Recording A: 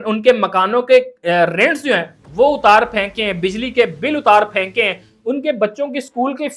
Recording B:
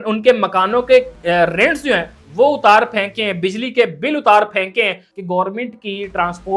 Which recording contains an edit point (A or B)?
B